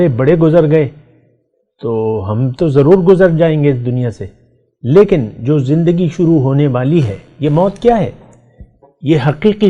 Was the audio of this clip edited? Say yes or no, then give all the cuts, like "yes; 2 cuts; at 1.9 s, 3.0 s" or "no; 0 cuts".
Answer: no; 0 cuts